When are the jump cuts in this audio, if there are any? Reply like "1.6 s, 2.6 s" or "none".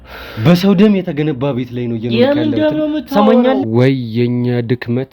3.6 s